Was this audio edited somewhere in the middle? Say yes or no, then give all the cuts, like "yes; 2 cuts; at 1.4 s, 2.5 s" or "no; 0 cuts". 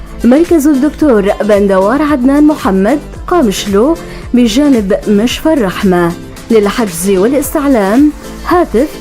yes; 1 cut; at 2.2 s